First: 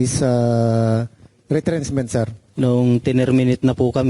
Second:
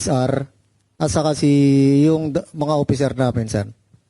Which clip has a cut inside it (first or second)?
first